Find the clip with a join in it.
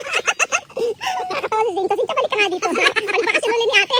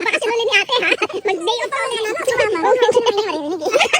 second; 1 cut; at 1.7 s

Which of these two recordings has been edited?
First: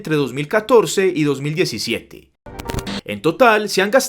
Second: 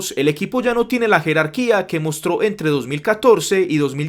first; 1 cut; at 2.5 s

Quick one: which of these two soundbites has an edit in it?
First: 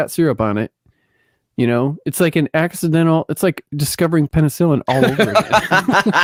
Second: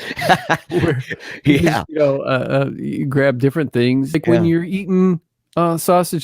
second; 1 cut; at 4.2 s

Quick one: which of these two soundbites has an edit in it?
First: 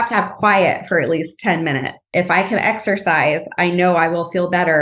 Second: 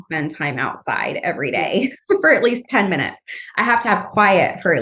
first; 2 cuts; at 2.1 s, 3.5 s

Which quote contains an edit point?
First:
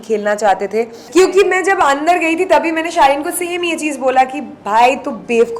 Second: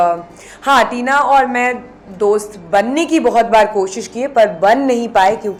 first; 1 cut; at 1.0 s

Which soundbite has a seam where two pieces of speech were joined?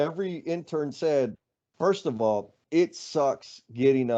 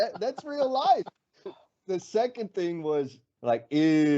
second; 1 cut; at 3.2 s

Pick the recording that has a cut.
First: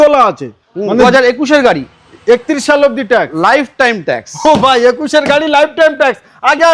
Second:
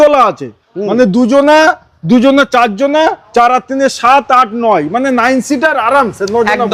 first; 1 cut; at 1.0 s

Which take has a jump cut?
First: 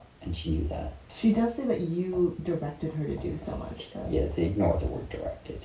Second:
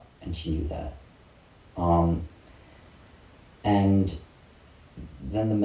first; 1 cut; at 1.1 s

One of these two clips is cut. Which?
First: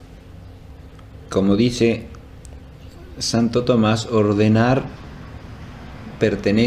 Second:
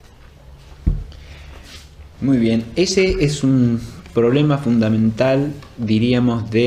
second; 1 cut; at 2.9 s

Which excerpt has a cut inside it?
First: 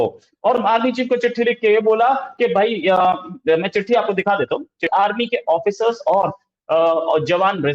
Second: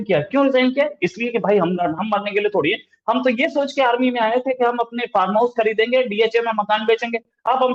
first; 1 cut; at 4.9 s

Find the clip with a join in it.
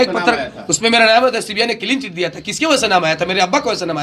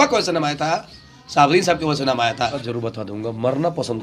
second; 1 cut; at 2.6 s

